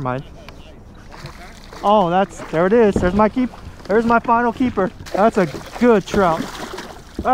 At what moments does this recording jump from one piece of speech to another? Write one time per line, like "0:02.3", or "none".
0:05.0